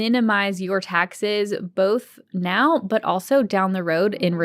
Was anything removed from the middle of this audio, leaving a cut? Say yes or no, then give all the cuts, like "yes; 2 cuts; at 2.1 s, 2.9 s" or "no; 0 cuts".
no; 0 cuts